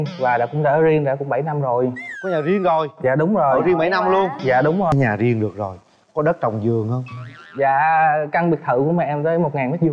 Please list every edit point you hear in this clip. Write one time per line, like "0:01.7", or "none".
0:04.9

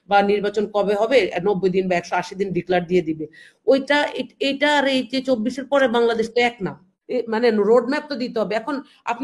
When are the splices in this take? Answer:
0:07.0

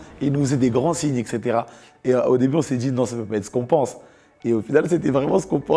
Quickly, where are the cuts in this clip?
none

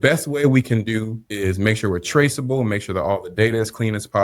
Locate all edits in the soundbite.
0:01.2

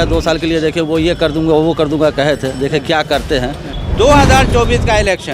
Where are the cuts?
0:03.7

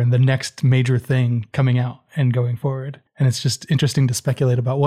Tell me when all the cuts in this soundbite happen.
0:01.5
0:03.0

